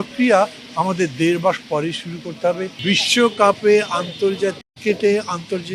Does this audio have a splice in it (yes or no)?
yes